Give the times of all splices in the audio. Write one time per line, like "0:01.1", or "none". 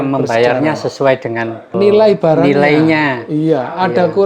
0:01.6